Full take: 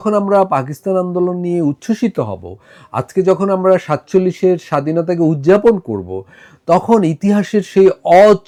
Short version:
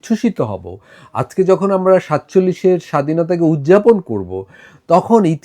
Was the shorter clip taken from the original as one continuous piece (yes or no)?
yes